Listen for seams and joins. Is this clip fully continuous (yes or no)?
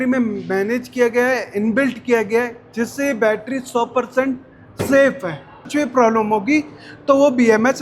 no